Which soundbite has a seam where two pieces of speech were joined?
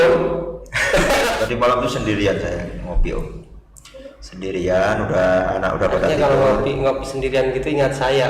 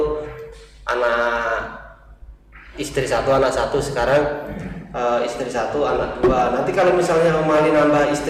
first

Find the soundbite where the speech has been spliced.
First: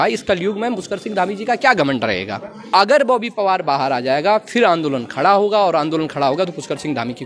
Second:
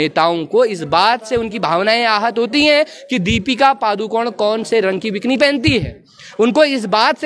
first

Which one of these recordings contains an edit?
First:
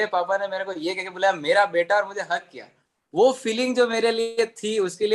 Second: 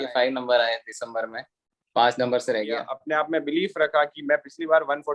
second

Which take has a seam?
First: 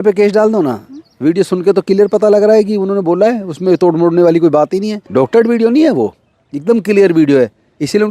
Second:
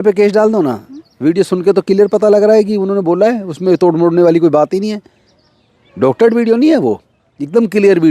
first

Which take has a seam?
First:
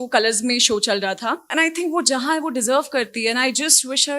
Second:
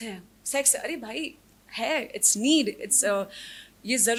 first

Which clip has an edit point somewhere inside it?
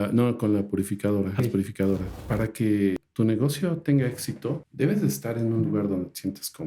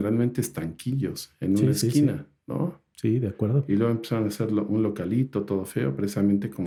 first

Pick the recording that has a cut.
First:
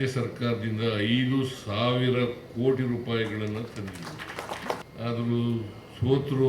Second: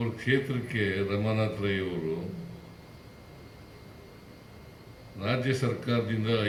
first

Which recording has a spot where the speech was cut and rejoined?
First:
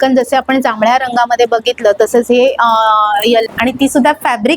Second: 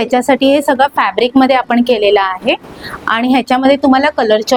first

